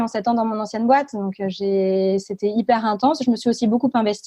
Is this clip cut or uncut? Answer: uncut